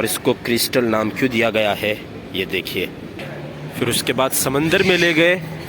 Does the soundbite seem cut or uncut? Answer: cut